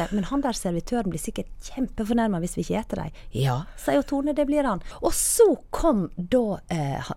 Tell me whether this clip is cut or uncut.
cut